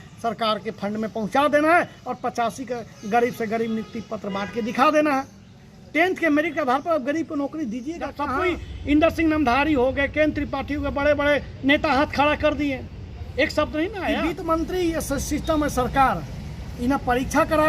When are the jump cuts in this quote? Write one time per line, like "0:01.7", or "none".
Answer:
0:08.3
0:14.1

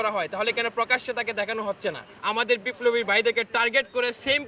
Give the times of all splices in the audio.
0:02.1

